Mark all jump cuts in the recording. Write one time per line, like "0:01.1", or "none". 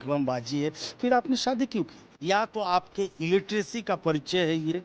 0:02.1